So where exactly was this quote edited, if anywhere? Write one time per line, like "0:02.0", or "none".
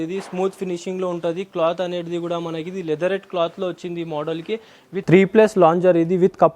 0:04.9